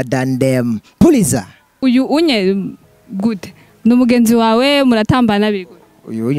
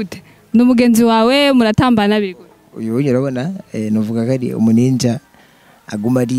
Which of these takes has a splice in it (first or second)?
first